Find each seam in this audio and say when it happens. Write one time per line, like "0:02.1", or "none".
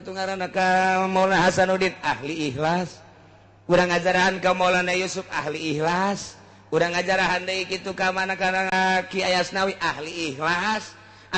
0:08.7